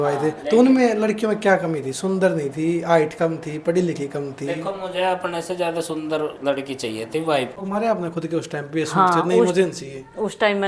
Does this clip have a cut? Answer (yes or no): yes